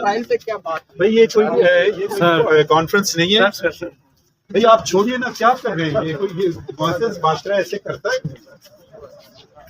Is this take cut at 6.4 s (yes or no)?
no